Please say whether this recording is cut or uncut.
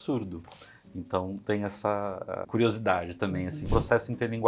cut